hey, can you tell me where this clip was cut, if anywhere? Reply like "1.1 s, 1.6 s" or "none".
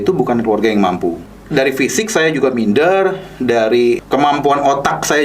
1.3 s, 4.0 s